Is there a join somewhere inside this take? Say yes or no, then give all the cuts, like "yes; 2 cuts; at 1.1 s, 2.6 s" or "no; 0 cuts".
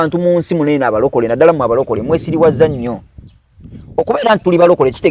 no; 0 cuts